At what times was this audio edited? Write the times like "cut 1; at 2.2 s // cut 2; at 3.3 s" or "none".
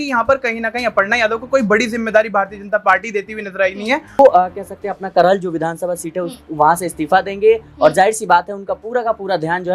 cut 1; at 4.2 s